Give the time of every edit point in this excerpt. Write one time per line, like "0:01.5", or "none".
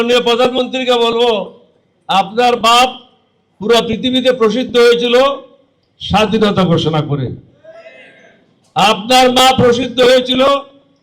0:02.9